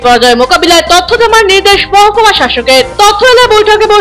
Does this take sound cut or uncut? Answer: uncut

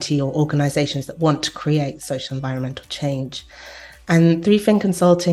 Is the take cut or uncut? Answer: uncut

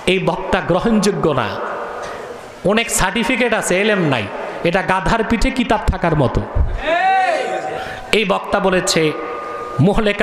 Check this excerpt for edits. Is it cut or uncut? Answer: cut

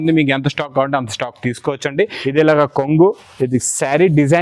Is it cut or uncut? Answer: cut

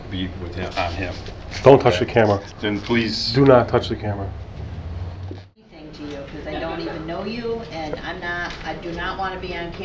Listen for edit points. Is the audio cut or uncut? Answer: cut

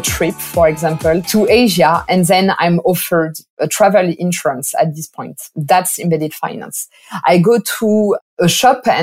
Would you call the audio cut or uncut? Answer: uncut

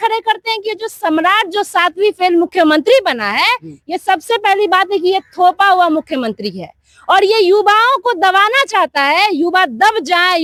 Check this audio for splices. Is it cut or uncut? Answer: uncut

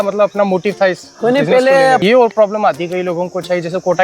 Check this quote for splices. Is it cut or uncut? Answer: cut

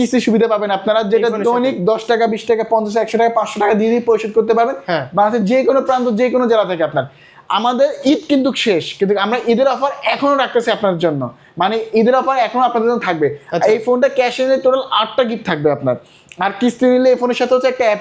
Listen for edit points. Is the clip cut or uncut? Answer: uncut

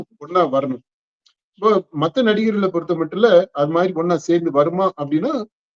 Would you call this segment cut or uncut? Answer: uncut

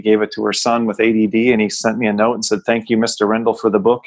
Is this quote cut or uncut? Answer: cut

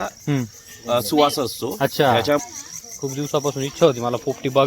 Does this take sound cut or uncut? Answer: cut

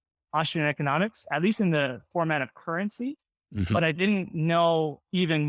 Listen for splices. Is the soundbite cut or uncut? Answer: uncut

